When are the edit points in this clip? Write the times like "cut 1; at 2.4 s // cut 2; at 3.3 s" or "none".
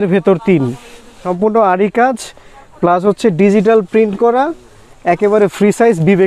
cut 1; at 1.3 s